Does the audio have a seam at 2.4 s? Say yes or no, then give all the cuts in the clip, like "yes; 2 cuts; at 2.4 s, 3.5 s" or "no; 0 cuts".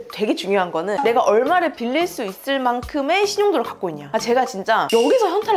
no; 0 cuts